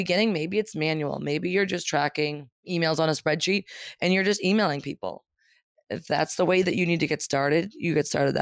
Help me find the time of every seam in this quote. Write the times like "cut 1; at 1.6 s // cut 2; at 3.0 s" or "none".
cut 1; at 2.5 s